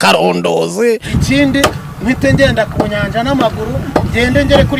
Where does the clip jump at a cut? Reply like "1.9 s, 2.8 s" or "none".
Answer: 1.1 s